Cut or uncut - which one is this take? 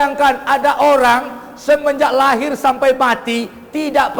uncut